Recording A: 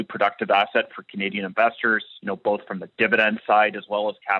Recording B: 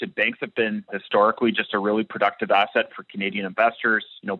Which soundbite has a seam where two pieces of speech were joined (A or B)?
B